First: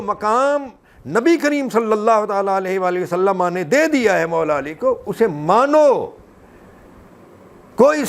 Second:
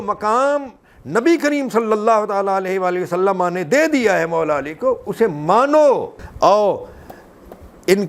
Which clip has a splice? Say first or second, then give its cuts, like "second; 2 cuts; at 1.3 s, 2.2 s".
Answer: second; 1 cut; at 6.3 s